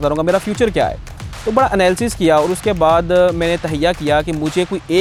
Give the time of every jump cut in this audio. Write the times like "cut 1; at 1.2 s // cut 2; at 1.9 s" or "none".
none